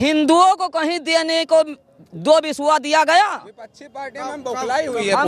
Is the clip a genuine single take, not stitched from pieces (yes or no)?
yes